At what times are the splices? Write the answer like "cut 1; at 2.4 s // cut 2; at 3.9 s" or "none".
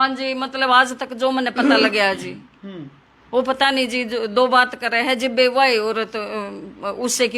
none